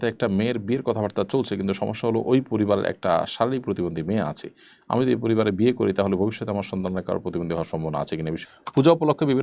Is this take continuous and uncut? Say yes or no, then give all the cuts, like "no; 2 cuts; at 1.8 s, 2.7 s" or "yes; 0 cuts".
no; 1 cut; at 8.4 s